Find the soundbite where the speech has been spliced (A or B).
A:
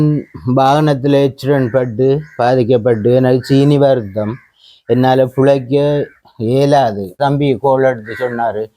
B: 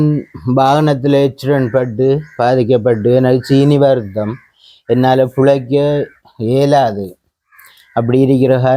A